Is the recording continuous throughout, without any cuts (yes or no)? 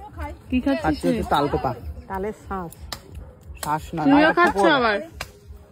yes